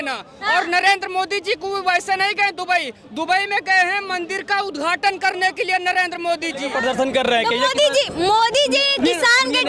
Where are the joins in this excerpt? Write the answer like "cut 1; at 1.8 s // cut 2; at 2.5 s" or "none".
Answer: cut 1; at 7.0 s